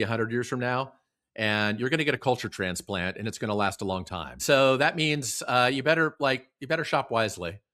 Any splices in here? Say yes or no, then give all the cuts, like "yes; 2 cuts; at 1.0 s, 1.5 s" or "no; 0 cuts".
yes; 1 cut; at 4.4 s